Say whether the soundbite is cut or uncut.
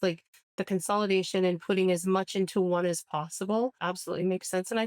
cut